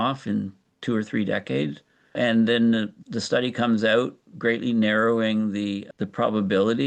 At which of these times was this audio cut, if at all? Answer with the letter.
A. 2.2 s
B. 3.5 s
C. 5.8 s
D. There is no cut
A